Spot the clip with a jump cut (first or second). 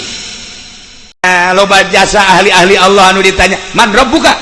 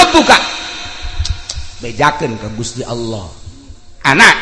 first